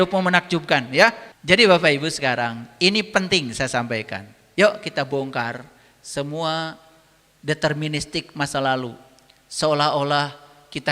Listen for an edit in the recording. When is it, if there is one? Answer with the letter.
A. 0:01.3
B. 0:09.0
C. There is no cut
A